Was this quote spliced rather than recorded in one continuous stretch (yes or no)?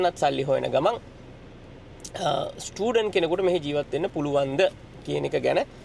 no